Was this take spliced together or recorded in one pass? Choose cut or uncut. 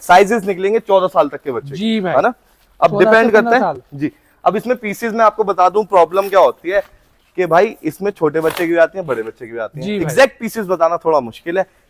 uncut